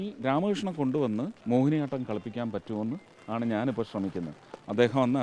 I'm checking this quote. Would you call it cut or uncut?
cut